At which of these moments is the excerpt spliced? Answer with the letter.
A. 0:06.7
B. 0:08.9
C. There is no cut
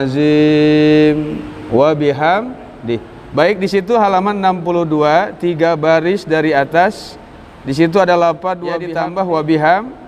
B